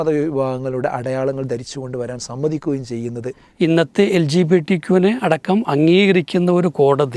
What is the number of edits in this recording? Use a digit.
1